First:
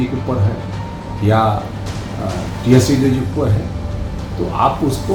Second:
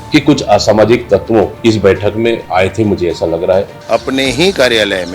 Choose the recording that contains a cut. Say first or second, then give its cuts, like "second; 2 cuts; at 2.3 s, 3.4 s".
second; 3 cuts; at 1.5 s, 2.4 s, 3.8 s